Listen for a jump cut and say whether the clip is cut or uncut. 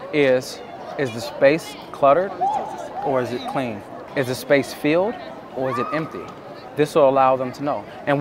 cut